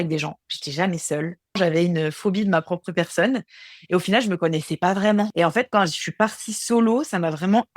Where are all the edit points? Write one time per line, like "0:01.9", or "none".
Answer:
0:01.6
0:05.3